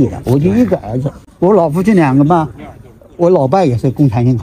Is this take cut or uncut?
uncut